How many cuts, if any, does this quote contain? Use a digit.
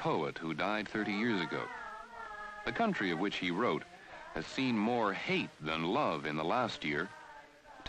0